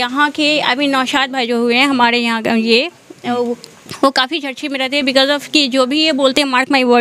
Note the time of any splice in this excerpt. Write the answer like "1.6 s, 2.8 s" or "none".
none